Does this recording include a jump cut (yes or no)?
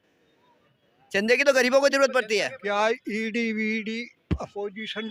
yes